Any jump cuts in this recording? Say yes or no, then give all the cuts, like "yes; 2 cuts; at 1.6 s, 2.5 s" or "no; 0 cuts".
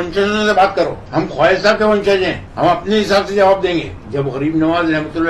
yes; 3 cuts; at 1.0 s, 2.4 s, 4.0 s